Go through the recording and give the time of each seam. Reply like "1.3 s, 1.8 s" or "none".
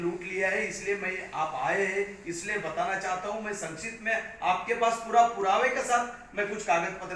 none